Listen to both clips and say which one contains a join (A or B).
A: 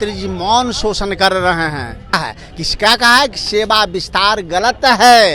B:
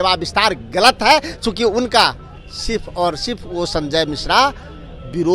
A